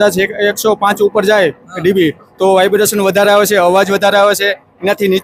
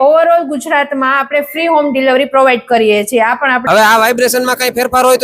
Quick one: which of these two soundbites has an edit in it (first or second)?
second